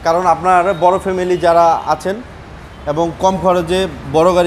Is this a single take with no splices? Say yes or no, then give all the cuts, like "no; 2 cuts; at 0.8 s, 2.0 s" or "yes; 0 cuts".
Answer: yes; 0 cuts